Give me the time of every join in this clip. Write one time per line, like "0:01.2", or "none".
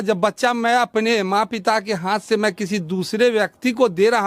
none

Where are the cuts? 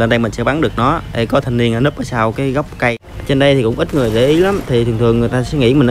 0:02.9

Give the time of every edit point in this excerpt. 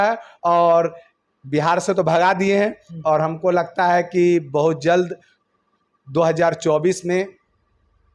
none

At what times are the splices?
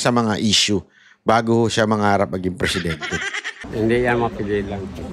0:03.5

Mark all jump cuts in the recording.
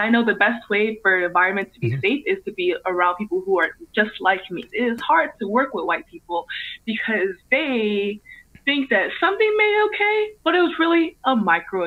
0:04.6

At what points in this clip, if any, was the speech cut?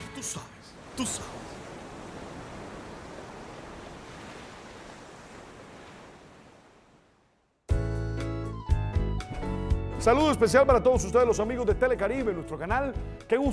none

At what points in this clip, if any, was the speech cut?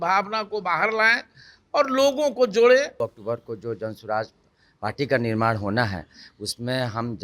0:03.0

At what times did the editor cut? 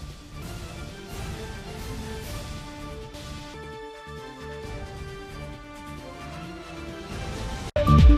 none

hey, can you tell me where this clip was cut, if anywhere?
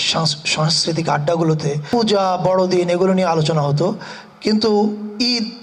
0:01.8

